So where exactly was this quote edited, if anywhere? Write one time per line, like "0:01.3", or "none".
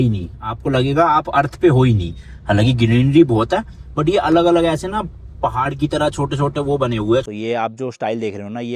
0:07.3